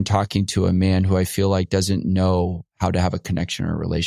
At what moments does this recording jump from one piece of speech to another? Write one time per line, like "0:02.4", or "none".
none